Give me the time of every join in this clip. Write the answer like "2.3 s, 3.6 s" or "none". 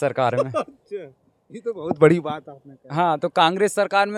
none